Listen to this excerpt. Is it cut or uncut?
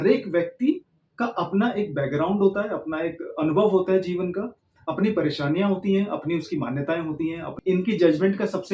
cut